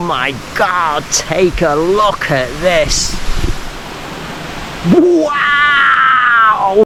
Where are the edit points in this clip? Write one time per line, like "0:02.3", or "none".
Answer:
none